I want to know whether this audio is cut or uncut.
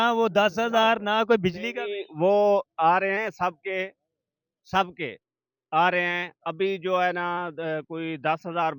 uncut